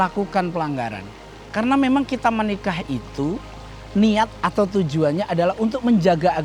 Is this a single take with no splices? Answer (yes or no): no